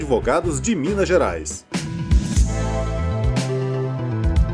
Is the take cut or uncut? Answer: cut